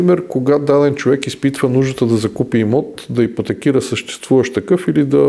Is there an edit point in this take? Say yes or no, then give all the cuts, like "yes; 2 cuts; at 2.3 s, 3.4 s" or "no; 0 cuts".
no; 0 cuts